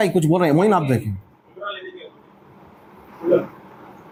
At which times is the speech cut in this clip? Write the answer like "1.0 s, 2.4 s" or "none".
none